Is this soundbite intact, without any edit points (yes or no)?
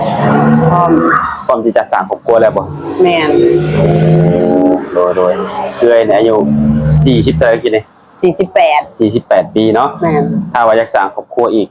yes